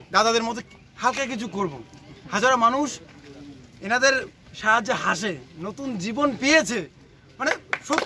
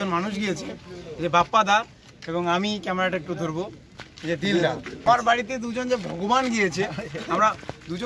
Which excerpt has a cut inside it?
second; 1 cut; at 5.0 s

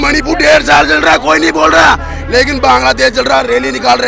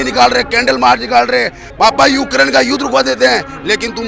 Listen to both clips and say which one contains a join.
second; 1 cut; at 1.6 s

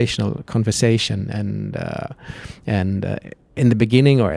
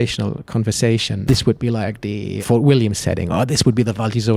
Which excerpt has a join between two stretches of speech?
second; 2 cuts; at 1.3 s, 2.4 s

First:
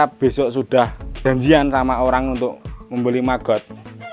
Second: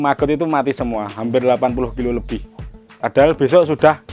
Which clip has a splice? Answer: first; 1 cut; at 1.0 s

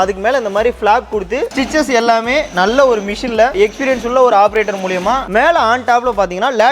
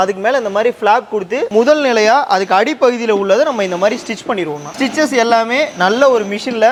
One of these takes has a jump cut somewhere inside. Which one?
first; 2 cuts; at 1.5 s, 5.3 s

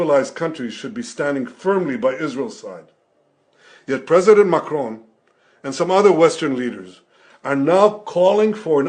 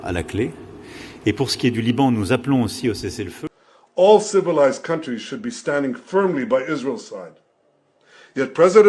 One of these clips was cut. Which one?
second; 1 cut; at 3.3 s

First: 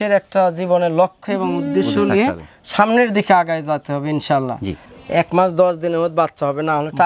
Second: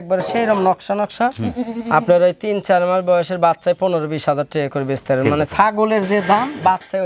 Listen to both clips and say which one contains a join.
first; 1 cut; at 4.9 s

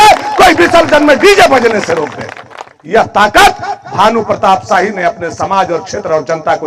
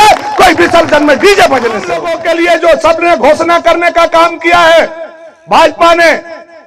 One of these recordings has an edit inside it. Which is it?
second; 1 cut; at 2.1 s

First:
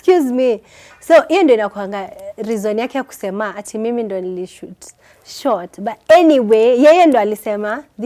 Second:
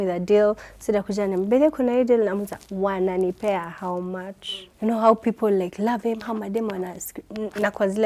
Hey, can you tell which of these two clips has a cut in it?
second; 1 cut; at 4.6 s

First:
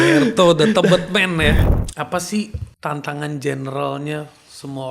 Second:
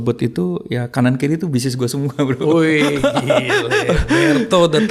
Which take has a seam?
first; 2 cuts; at 1.7 s, 2.6 s

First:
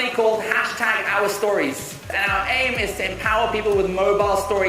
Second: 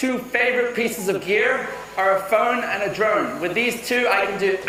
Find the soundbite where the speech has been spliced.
first; 1 cut; at 2.1 s

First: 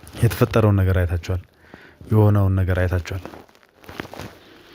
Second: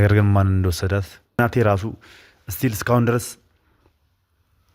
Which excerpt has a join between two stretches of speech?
second; 1 cut; at 1.4 s

